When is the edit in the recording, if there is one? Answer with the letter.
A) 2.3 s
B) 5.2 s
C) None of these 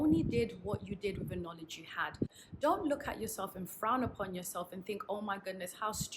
A